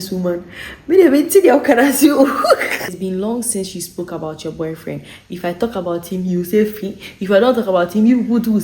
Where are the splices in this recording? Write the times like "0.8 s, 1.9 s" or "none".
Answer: 2.9 s